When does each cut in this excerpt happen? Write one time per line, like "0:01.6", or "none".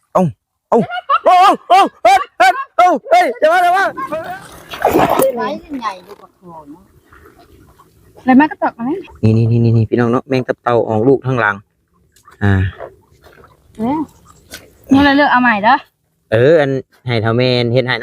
0:04.0